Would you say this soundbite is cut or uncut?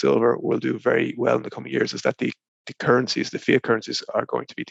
uncut